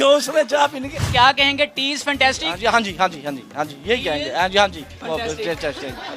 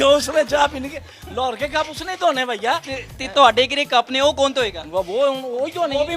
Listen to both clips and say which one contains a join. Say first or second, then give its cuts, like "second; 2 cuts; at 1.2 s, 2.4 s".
first; 2 cuts; at 1.0 s, 4.9 s